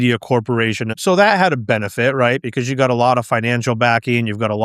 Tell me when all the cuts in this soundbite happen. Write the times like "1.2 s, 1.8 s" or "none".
0.9 s